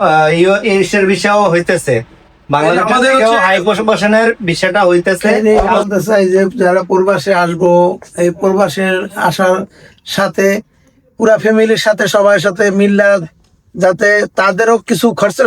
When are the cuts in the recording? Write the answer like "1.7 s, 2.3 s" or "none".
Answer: 5.4 s